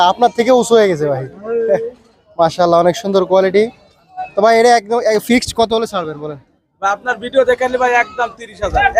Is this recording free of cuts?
yes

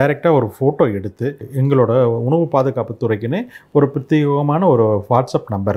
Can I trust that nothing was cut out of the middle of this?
no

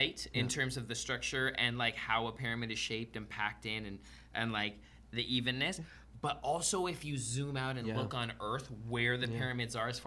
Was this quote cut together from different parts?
no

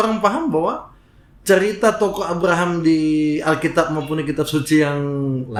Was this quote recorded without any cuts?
yes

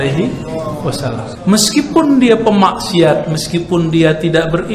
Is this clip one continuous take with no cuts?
no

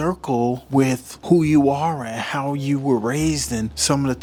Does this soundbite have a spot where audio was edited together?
no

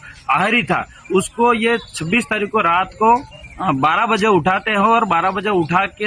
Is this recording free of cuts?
yes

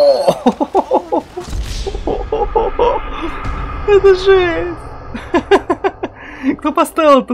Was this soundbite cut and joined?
no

